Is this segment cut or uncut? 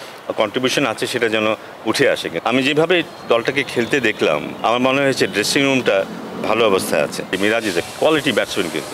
cut